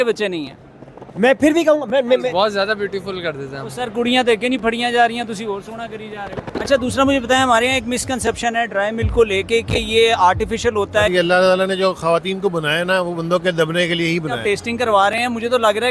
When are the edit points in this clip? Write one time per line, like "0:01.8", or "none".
0:02.3
0:06.4
0:11.1
0:14.4